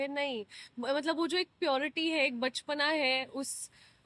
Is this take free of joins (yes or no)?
yes